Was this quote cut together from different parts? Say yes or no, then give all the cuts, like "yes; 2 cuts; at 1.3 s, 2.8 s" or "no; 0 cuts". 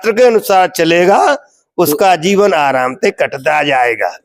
no; 0 cuts